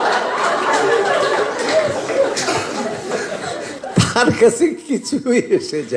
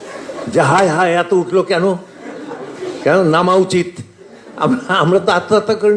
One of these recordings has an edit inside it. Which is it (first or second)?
first